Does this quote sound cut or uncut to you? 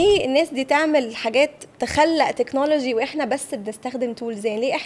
uncut